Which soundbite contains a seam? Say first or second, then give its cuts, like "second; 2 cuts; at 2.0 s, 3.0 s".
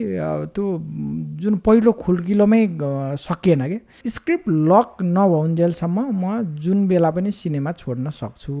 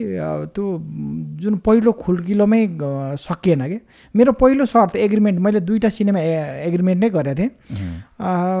first; 1 cut; at 4.0 s